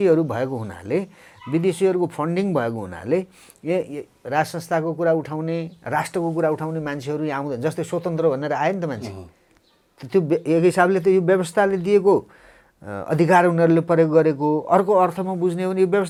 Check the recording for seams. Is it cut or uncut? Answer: uncut